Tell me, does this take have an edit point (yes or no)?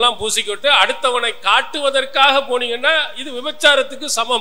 no